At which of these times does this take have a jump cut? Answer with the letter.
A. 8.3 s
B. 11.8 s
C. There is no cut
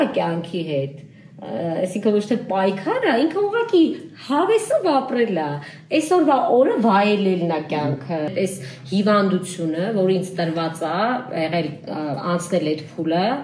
A